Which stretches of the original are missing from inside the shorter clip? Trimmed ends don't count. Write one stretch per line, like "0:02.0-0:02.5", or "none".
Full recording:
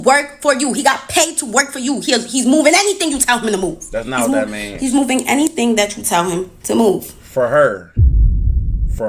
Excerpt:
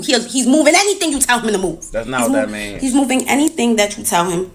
none